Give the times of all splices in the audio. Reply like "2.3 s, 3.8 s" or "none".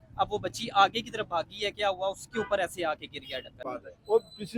3.6 s